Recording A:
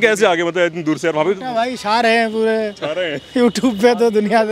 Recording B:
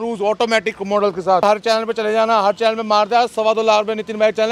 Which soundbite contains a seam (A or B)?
B